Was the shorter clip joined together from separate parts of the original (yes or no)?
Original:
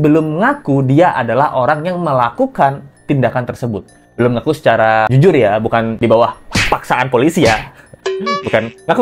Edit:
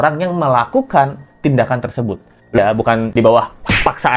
yes